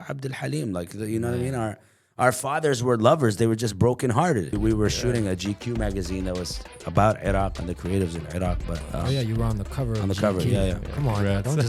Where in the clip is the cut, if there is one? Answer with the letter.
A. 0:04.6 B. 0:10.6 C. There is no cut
A